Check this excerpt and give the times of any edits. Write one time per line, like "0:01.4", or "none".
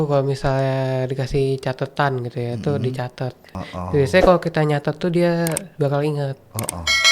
0:03.6